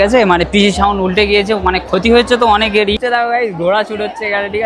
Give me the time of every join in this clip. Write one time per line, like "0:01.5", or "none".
0:03.0